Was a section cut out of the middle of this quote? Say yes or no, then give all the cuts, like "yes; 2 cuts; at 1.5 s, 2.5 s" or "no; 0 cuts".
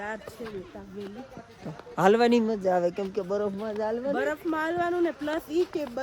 no; 0 cuts